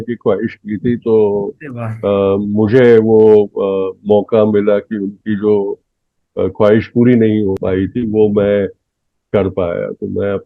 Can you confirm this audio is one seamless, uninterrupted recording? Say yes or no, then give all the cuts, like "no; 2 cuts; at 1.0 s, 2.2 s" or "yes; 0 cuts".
no; 1 cut; at 7.6 s